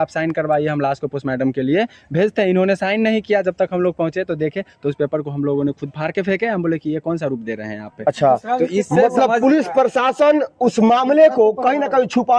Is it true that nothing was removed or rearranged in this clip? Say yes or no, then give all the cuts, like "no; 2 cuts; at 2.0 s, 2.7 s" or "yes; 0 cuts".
yes; 0 cuts